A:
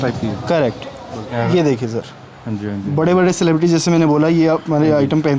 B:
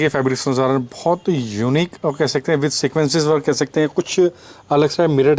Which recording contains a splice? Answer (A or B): A